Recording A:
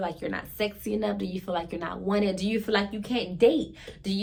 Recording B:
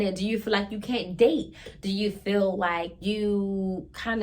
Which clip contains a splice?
B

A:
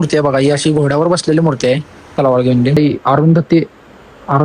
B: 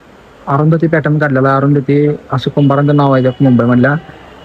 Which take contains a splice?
A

